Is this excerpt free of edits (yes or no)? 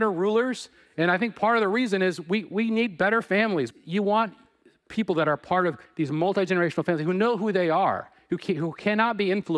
no